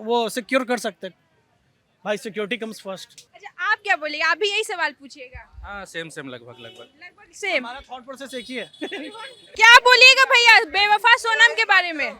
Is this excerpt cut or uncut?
uncut